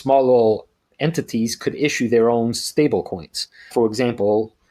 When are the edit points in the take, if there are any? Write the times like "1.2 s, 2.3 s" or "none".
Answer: 3.7 s